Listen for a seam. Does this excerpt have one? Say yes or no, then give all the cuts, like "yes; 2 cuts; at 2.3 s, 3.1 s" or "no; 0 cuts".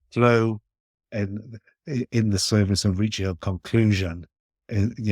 no; 0 cuts